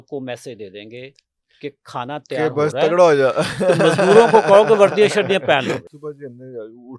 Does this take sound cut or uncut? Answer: cut